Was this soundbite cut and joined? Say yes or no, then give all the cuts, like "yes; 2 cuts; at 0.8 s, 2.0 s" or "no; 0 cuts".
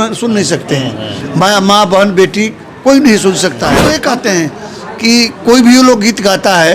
yes; 1 cut; at 3.7 s